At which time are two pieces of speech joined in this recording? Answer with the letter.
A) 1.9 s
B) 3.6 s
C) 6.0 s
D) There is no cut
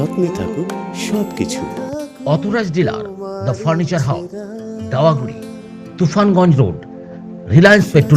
D